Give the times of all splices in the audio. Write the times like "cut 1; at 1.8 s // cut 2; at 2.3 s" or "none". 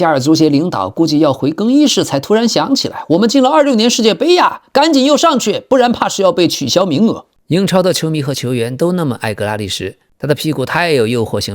cut 1; at 7.3 s